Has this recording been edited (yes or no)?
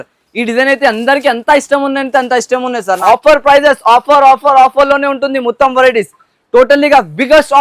yes